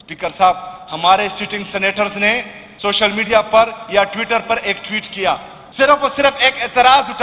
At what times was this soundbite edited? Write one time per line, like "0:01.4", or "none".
0:02.6
0:05.6